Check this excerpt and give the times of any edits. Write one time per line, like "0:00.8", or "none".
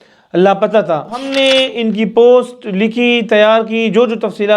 0:01.2

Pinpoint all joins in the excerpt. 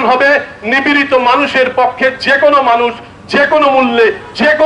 none

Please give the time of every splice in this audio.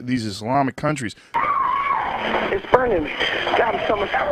none

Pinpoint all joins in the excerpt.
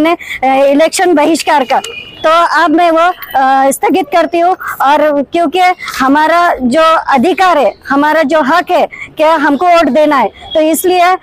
none

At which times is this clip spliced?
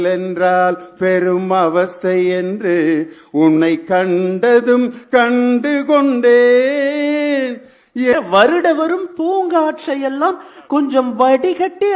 0:08.1

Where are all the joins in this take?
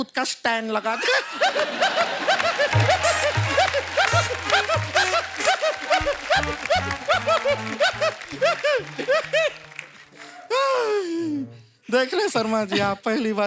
none

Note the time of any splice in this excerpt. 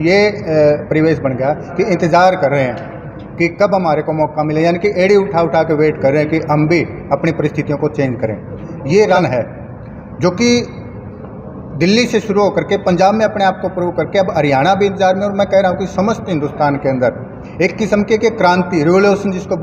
0:09.2

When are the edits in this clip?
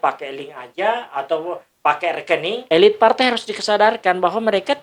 0:02.6

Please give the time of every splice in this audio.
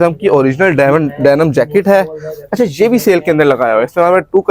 none

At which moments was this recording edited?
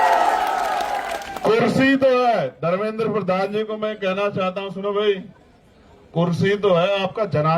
0:01.2

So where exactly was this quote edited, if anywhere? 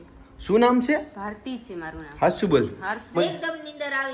0:03.1

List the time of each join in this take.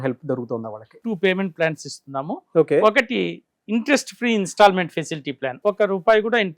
0:00.9
0:05.5

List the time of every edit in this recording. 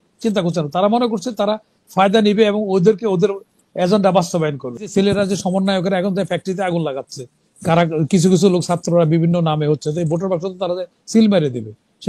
0:04.9

